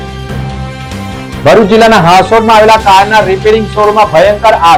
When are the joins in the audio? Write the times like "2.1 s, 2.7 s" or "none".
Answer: none